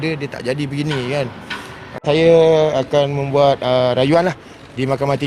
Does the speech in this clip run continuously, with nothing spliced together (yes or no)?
no